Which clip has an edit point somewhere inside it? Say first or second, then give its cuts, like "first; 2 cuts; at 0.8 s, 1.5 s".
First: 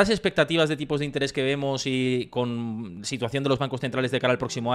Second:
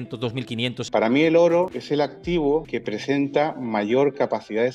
second; 3 cuts; at 0.8 s, 1.8 s, 2.7 s